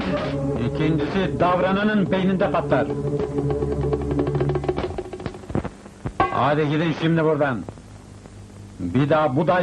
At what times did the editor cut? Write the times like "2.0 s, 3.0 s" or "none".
none